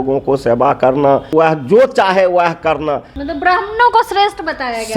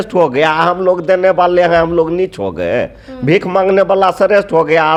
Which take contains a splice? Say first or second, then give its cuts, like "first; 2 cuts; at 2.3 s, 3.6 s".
first; 2 cuts; at 1.3 s, 3.1 s